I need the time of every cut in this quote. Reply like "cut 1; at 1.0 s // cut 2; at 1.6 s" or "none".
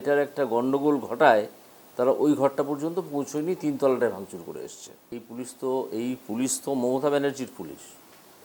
cut 1; at 5.2 s